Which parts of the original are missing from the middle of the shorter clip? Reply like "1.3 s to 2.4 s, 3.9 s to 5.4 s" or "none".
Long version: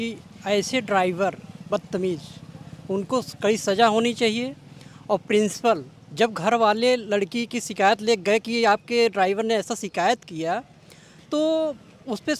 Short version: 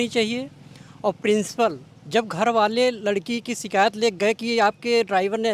none